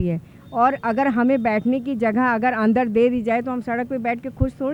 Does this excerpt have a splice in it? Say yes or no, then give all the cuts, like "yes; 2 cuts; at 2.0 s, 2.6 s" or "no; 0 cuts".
no; 0 cuts